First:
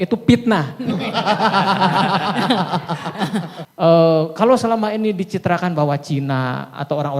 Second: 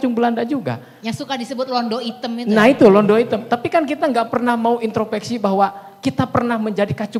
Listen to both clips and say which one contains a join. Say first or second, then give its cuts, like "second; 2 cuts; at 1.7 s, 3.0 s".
first; 1 cut; at 3.6 s